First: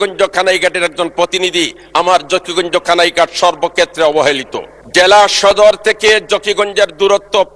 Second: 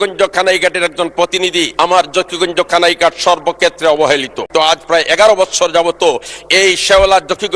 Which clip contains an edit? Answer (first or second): second